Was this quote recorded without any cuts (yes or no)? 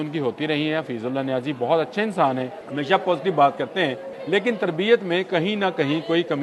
no